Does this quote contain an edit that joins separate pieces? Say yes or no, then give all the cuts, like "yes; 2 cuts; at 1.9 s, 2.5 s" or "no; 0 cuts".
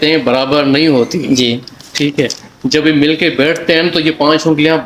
no; 0 cuts